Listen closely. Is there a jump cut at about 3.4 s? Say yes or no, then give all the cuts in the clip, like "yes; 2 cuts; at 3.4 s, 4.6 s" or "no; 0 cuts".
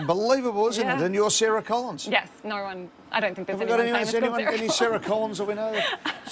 yes; 1 cut; at 3.4 s